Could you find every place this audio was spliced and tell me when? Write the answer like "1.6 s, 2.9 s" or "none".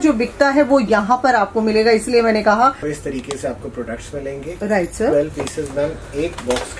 2.9 s